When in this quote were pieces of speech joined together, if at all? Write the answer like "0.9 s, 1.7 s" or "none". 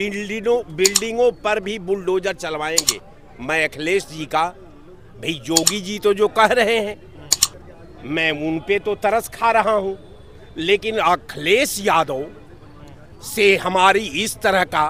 none